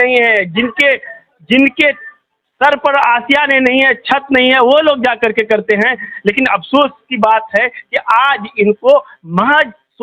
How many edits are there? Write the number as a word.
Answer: zero